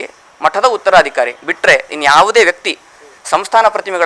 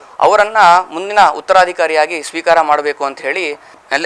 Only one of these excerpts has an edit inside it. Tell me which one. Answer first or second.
first